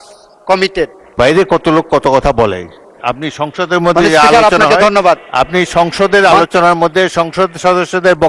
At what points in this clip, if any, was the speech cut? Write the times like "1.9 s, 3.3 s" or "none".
1.1 s